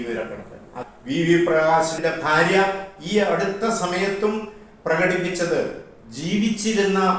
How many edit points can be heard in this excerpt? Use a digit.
2